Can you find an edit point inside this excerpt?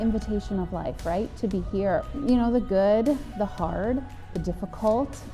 yes; 1 cut; at 2.2 s

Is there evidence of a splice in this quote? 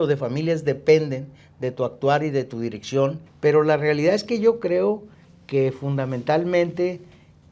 yes; 1 cut; at 3.3 s

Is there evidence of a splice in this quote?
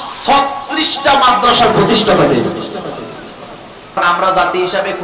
yes; 1 cut; at 4.0 s

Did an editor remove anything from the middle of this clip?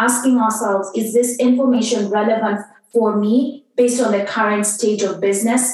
no; 0 cuts

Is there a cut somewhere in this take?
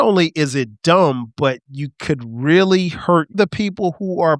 yes; 1 cut; at 3.4 s

